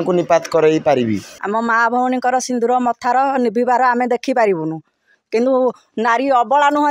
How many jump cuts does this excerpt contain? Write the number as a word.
one